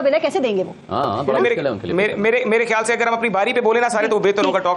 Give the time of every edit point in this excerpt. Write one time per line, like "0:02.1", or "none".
none